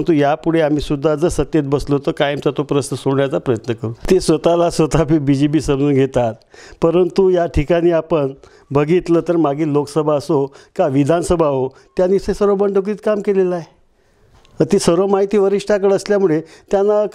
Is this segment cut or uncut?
cut